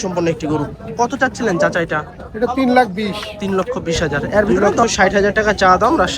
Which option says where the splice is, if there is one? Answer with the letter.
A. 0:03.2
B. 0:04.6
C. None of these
B